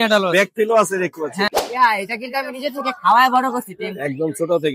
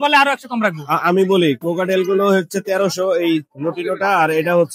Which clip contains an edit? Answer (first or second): first